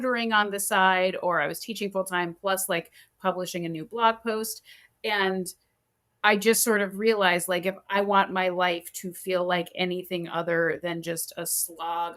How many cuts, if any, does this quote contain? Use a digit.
0